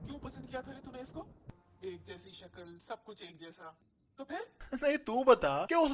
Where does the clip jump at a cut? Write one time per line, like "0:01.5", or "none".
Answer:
none